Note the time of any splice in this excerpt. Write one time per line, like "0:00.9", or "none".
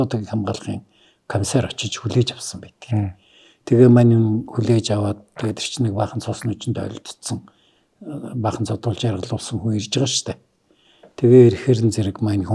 none